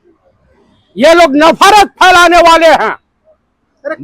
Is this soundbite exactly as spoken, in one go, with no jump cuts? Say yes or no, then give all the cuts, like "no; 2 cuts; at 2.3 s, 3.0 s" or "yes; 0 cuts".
yes; 0 cuts